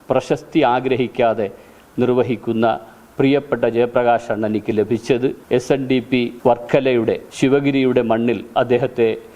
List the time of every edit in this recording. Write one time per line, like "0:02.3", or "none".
0:05.4
0:06.3
0:07.3